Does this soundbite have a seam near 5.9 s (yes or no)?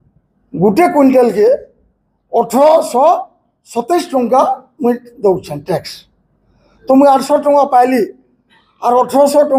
no